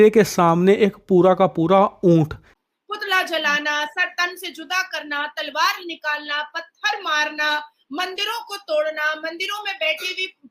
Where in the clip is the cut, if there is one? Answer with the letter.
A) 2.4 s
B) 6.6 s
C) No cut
A